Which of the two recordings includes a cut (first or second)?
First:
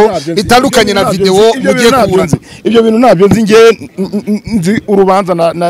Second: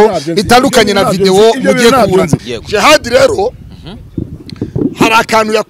second